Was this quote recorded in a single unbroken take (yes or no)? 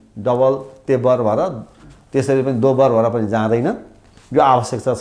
yes